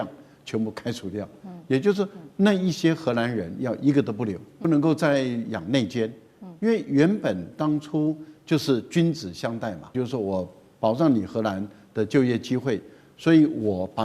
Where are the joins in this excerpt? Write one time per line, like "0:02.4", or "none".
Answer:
0:04.6
0:09.9